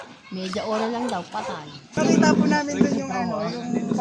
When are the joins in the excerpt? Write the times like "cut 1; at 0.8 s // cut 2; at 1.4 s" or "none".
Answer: cut 1; at 1.9 s